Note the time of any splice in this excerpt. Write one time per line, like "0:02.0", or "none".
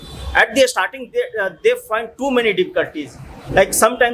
none